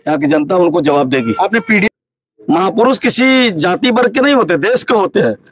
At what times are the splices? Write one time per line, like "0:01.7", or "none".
0:01.9